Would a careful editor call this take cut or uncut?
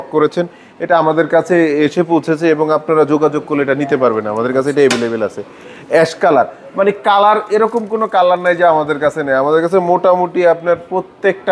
uncut